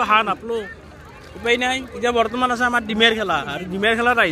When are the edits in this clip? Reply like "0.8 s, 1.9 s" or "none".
none